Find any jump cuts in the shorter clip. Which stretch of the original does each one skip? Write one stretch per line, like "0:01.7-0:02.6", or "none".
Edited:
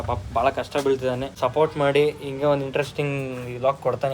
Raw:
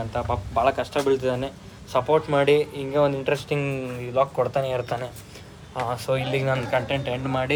0:01.5-0:01.8